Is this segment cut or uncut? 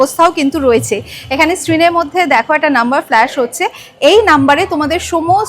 uncut